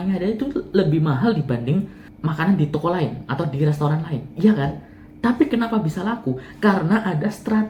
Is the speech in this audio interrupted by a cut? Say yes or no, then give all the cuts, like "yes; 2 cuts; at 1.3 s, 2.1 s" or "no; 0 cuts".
yes; 1 cut; at 2.0 s